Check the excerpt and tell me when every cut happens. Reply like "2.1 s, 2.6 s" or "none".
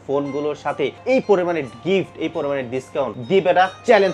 1.0 s, 3.2 s